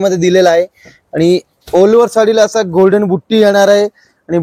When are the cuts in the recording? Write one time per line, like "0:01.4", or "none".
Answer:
none